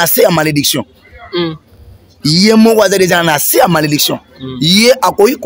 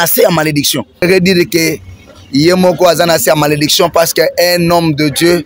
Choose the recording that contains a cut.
second; 1 cut; at 1.0 s

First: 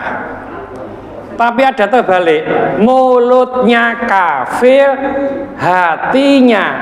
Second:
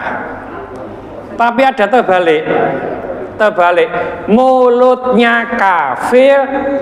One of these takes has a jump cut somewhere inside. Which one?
first; 1 cut; at 2.7 s

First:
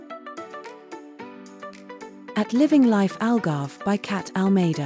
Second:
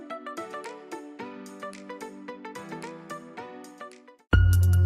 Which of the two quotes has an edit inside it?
first; 1 cut; at 2.3 s

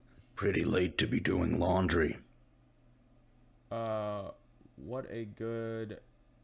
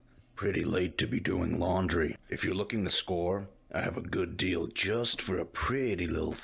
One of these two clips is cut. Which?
second; 1 cut; at 2.3 s

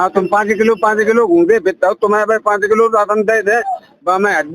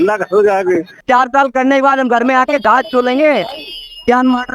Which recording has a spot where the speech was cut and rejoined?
second; 1 cut; at 1.0 s

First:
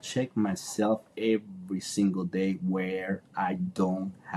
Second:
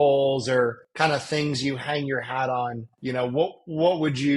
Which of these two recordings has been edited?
second; 2 cuts; at 0.8 s, 2.9 s

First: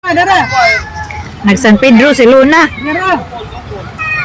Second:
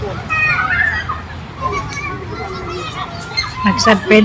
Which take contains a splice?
second; 1 cut; at 1.6 s

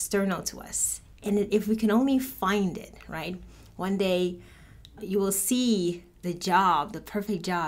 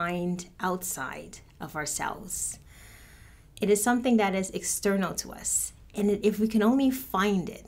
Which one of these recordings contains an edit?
first; 2 cuts; at 5.0 s, 6.1 s

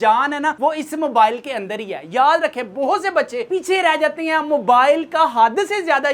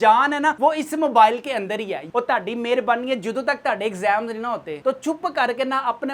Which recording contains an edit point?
second; 1 cut; at 2.0 s

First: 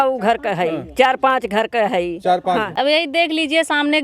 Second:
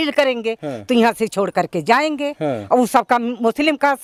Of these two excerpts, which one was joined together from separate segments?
first; 1 cut; at 2.7 s

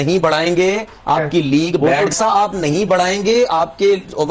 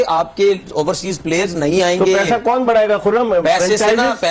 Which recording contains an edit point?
first; 1 cut; at 2.1 s

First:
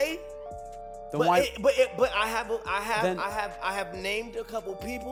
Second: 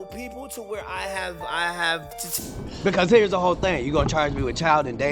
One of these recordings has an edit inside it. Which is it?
second; 1 cut; at 2.2 s

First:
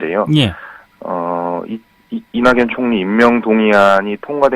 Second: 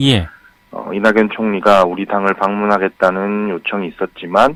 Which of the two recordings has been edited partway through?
first; 1 cut; at 1.7 s

